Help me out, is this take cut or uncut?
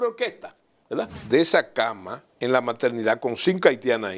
cut